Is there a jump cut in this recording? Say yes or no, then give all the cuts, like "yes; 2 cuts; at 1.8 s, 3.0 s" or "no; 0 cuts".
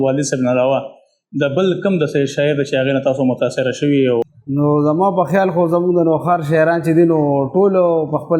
yes; 1 cut; at 4.2 s